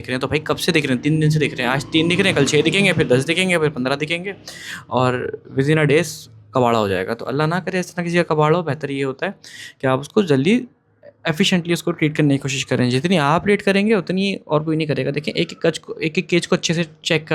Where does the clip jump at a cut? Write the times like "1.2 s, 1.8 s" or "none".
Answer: none